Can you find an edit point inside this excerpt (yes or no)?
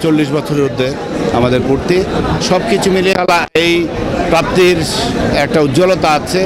no